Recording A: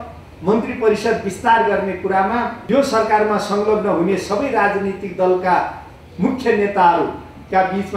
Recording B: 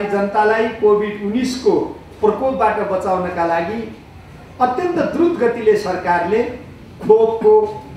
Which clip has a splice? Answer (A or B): A